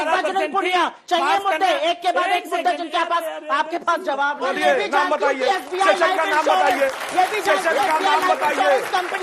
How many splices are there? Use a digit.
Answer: 1